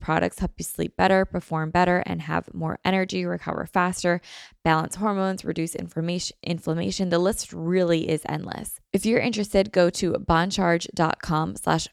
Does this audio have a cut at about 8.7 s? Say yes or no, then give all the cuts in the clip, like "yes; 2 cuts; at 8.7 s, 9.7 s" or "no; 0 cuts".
yes; 1 cut; at 8.7 s